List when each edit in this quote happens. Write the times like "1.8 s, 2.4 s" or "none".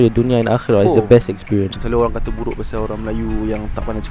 1.8 s